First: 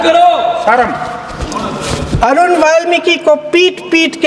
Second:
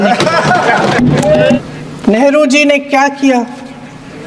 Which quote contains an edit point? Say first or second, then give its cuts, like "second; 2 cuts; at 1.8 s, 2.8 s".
second; 1 cut; at 1.6 s